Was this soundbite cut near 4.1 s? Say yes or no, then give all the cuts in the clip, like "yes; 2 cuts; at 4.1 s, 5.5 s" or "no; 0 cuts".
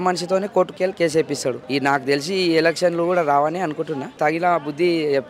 yes; 1 cut; at 4.1 s